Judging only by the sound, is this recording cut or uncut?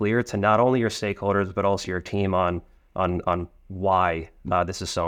uncut